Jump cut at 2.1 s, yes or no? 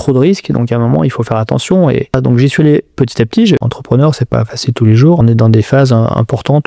yes